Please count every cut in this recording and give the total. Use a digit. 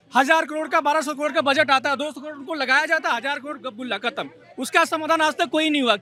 0